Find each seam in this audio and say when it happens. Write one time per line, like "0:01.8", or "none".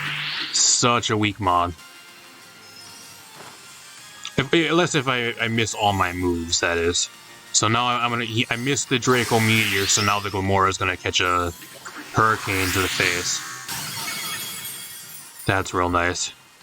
0:01.8